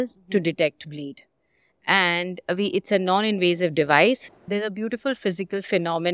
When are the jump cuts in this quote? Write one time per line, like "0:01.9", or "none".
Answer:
0:04.3